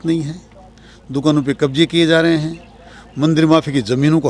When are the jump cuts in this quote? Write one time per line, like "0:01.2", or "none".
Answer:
none

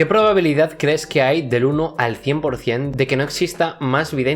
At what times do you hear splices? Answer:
none

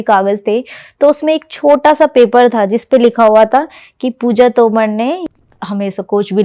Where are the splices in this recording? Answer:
0:05.2

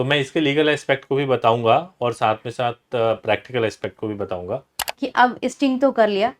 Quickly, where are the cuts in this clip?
0:04.8

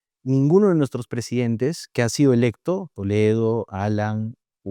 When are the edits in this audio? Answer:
none

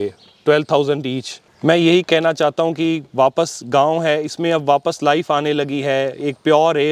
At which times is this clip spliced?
0:01.4

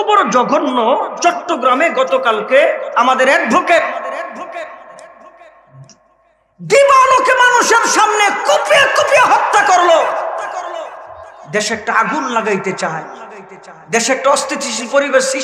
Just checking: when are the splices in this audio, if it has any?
none

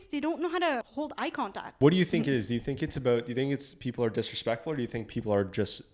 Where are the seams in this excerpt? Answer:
0:01.5

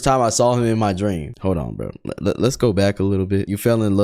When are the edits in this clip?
0:01.3

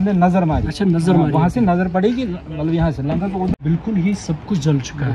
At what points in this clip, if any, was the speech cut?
0:03.6

